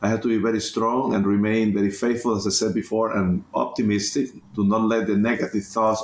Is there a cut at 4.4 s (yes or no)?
no